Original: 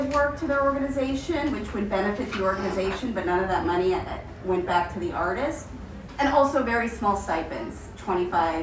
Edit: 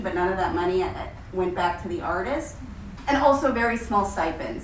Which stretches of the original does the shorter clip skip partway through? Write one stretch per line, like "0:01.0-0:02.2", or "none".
none